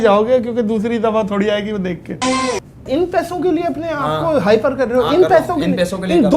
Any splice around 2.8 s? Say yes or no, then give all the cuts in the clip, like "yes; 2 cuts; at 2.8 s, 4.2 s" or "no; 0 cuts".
yes; 1 cut; at 2.8 s